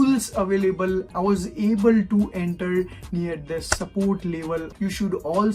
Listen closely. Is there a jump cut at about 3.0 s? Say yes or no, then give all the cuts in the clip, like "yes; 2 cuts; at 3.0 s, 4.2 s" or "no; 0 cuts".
no; 2 cuts; at 1.1 s, 4.7 s